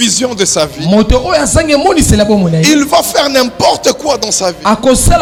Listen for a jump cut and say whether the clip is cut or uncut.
uncut